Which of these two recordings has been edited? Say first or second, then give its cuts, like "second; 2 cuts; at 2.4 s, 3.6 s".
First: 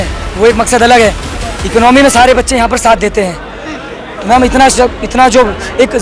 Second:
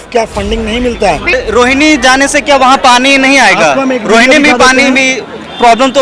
second; 1 cut; at 1.4 s